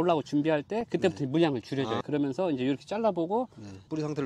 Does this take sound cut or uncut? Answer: uncut